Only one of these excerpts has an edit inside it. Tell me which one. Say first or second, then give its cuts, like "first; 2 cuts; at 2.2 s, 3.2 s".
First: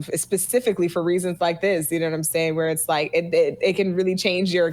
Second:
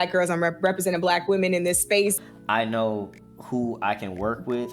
second; 1 cut; at 2.2 s